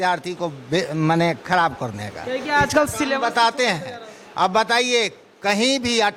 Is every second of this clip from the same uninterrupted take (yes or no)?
yes